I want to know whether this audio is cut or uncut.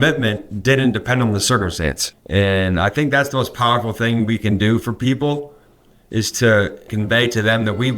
cut